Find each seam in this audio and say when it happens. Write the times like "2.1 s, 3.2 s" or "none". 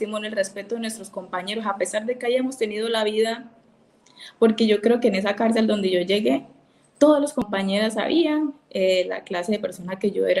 7.5 s